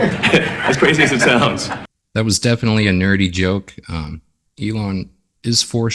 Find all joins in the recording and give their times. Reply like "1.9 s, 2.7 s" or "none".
1.9 s